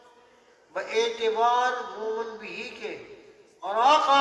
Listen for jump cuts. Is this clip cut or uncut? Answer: uncut